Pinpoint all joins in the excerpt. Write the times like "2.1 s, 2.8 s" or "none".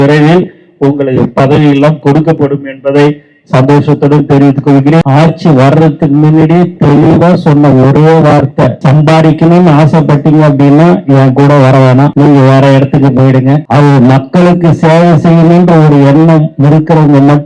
5.1 s, 8.8 s, 12.1 s, 13.6 s